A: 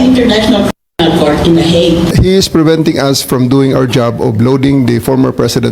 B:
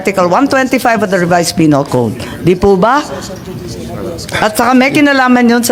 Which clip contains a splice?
A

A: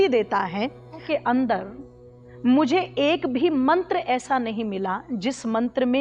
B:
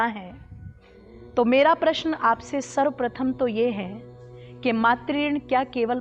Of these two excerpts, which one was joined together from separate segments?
A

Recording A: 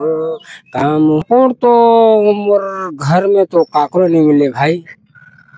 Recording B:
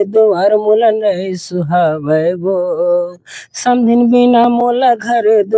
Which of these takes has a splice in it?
A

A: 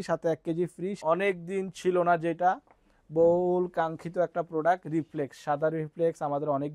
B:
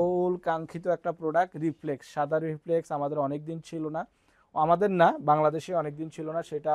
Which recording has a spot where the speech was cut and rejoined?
A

